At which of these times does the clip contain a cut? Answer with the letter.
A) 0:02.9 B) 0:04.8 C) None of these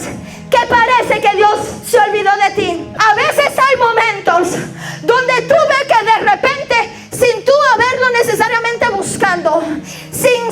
A